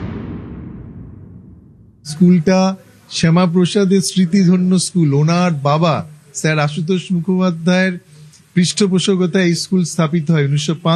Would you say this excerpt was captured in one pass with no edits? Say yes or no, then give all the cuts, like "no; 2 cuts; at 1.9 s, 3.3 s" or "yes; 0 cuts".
no; 1 cut; at 1.6 s